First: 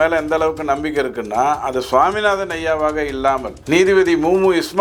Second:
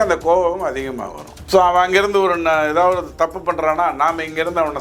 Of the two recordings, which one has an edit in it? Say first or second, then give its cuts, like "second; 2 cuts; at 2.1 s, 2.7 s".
second; 1 cut; at 1.3 s